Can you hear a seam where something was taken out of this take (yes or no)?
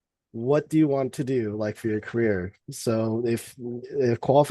no